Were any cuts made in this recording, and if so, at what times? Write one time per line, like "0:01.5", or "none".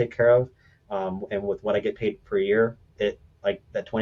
none